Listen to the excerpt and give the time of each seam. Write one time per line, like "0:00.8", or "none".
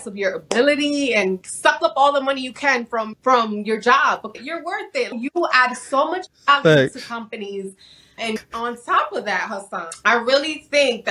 0:01.4
0:03.1
0:04.6
0:08.4